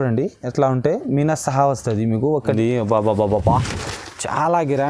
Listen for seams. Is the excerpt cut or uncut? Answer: cut